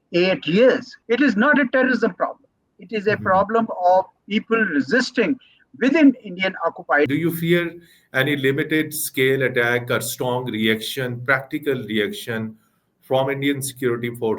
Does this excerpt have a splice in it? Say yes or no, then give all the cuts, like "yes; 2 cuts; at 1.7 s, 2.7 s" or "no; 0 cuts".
yes; 2 cuts; at 0.9 s, 7.1 s